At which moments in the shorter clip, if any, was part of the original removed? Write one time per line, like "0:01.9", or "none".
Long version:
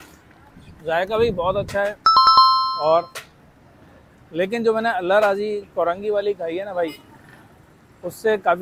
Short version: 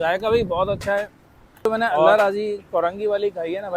0:01.1